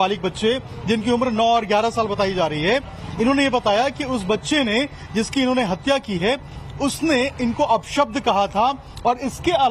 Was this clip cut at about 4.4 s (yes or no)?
yes